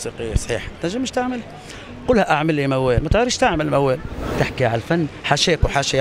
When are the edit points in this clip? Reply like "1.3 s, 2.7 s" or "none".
4.3 s